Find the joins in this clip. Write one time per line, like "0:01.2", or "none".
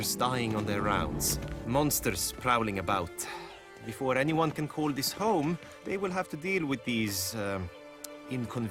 none

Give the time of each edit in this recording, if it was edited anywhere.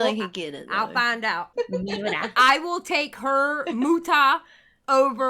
0:01.5

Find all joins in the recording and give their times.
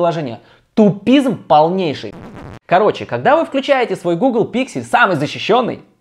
0:02.2

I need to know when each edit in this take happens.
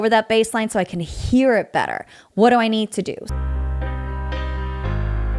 0:03.3

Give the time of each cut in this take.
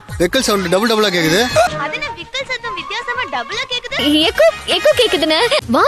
0:01.7
0:04.0

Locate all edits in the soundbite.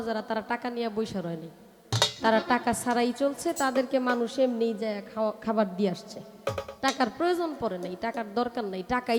none

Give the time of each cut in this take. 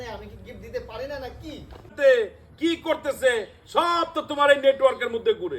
0:01.8

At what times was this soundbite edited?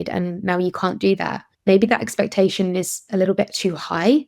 none

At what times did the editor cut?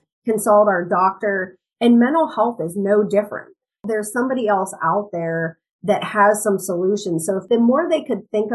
0:03.8
0:07.4

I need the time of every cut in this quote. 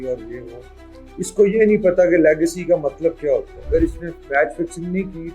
0:03.6

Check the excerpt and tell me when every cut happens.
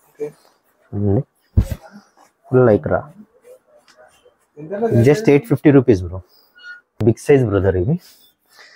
0:07.0

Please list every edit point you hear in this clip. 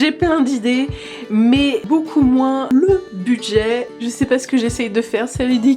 0:01.8
0:02.7

